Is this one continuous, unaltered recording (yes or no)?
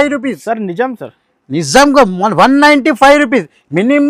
yes